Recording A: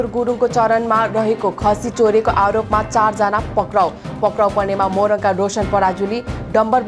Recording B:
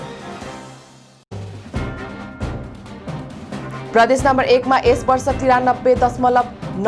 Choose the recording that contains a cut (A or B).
B